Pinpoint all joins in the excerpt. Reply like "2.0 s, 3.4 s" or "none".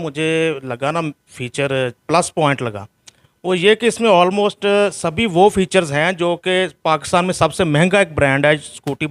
none